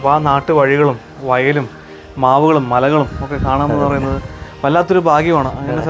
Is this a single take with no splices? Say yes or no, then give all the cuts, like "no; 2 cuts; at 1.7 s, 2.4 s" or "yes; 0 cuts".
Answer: yes; 0 cuts